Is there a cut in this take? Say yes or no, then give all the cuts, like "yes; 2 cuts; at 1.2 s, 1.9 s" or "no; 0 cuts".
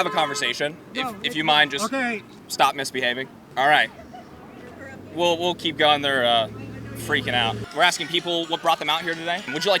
yes; 4 cuts; at 0.9 s, 2.3 s, 3.4 s, 7.6 s